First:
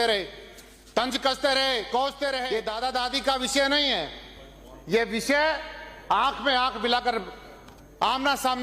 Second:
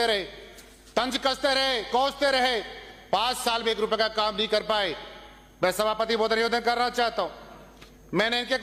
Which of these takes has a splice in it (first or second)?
first